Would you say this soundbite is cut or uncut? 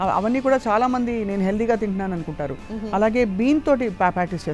uncut